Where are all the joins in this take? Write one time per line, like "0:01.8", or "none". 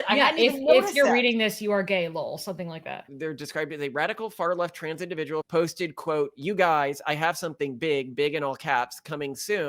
0:03.1
0:05.5